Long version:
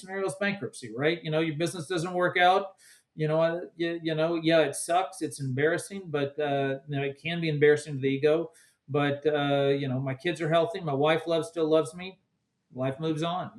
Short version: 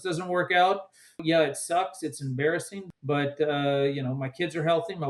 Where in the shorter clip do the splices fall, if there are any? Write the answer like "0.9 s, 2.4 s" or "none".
1.2 s, 2.8 s